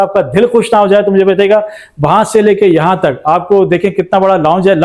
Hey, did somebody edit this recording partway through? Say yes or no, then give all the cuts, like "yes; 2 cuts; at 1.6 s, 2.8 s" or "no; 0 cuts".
no; 0 cuts